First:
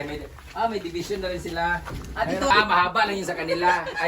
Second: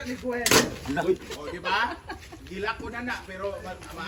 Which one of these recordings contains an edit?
first; 1 cut; at 2.5 s

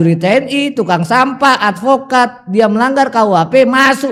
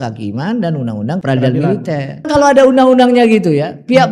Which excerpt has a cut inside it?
second; 2 cuts; at 1.2 s, 2.3 s

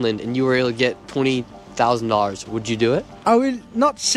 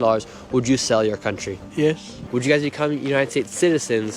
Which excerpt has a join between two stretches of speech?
second; 1 cut; at 2.1 s

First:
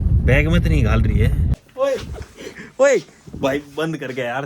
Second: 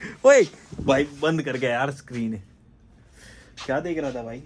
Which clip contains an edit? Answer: first; 1 cut; at 1.5 s

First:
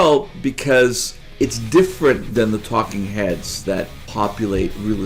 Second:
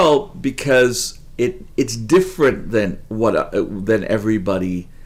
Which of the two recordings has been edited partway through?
first; 3 cuts; at 1.2 s, 2.2 s, 4.0 s

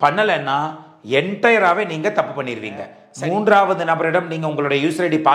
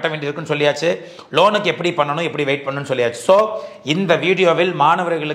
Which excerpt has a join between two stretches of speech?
first; 1 cut; at 3.0 s

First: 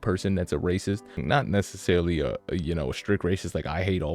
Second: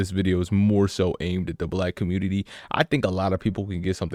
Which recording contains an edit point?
first; 1 cut; at 1.2 s

